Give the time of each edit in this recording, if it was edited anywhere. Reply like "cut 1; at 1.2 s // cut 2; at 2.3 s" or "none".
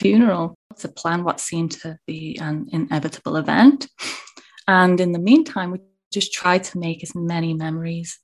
cut 1; at 0.9 s